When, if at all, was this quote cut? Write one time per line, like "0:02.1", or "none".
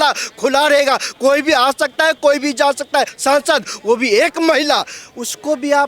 0:03.1